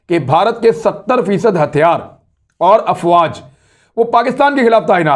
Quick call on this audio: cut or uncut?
uncut